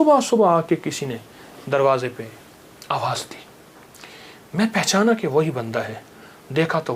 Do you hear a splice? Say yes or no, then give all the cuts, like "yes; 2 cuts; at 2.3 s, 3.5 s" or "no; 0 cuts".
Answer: no; 0 cuts